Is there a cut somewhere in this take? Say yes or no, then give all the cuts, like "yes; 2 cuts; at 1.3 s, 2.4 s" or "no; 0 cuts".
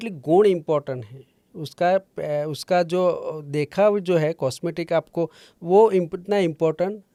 no; 0 cuts